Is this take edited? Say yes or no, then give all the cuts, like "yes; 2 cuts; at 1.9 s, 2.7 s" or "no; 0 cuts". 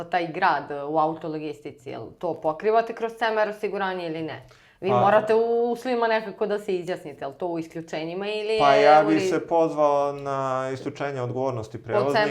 no; 0 cuts